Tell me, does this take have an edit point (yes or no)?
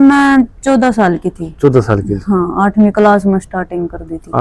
no